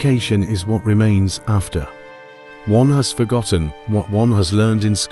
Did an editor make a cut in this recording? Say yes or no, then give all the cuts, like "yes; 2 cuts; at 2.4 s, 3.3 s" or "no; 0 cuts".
no; 0 cuts